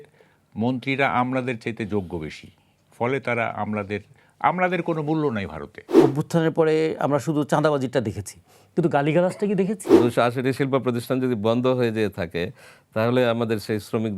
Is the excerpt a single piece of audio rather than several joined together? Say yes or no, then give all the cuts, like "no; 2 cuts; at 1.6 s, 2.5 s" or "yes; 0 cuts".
no; 2 cuts; at 6.0 s, 10.0 s